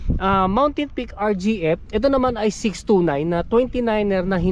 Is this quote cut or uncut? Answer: uncut